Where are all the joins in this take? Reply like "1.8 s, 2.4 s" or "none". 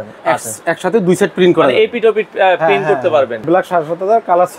3.4 s